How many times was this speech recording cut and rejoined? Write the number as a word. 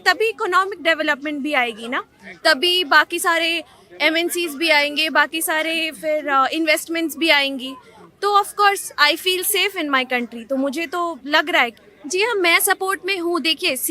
one